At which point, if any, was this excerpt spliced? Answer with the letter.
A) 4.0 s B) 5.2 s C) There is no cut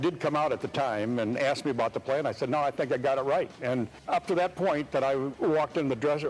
A